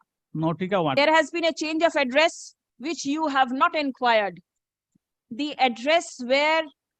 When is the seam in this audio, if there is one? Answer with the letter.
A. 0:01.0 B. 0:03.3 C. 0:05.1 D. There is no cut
A